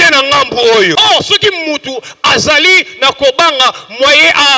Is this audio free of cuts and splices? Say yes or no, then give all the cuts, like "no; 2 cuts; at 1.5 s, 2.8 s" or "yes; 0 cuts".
no; 1 cut; at 0.9 s